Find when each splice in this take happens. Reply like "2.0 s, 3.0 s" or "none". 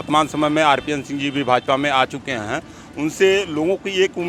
none

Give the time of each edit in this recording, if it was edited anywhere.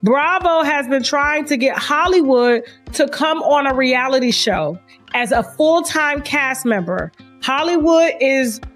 none

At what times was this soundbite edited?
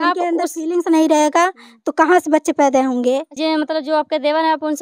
3.4 s

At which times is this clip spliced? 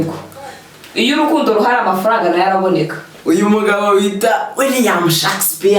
3.0 s

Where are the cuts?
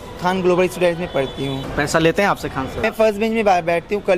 1.6 s, 2.9 s

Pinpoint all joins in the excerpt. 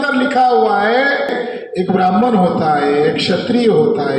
1.4 s

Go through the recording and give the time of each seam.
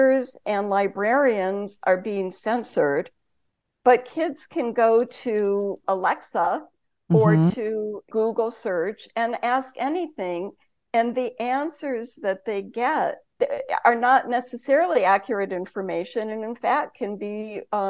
5.8 s, 8.1 s

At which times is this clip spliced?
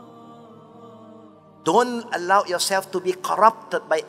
none

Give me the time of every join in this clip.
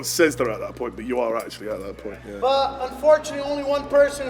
2.3 s

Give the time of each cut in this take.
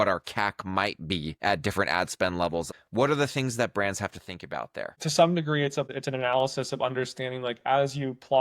1.3 s, 2.7 s, 4.9 s, 5.9 s

